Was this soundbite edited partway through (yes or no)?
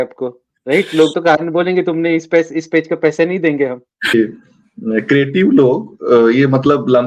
yes